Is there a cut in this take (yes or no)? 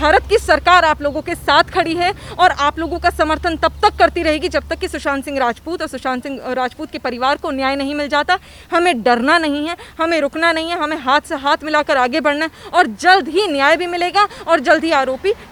no